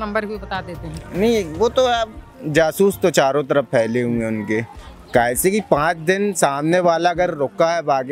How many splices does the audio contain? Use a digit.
1